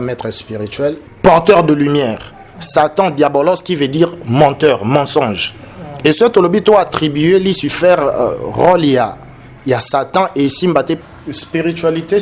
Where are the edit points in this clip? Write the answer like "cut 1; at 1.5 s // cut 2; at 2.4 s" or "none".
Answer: cut 1; at 1.1 s // cut 2; at 11.0 s